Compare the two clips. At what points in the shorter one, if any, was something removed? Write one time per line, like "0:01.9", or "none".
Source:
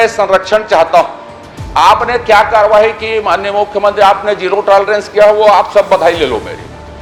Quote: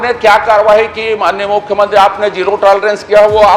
none

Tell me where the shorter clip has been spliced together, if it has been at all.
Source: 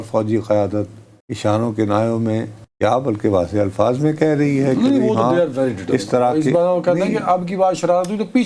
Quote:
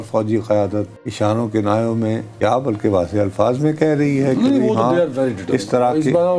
0:01.0
0:02.3

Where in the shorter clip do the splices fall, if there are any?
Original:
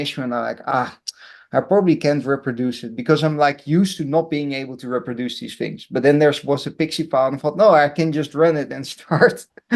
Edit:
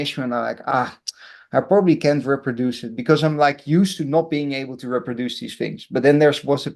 none

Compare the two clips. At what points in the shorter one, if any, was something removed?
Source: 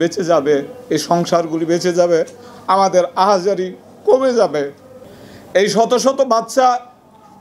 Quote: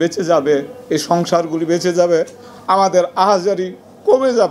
none

